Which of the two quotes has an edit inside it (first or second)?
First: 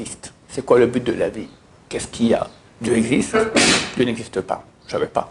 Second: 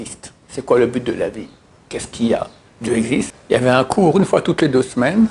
second